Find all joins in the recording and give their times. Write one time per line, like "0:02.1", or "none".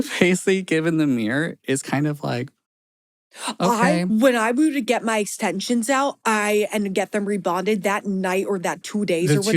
0:04.1